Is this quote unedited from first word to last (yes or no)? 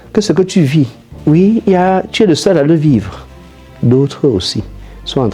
no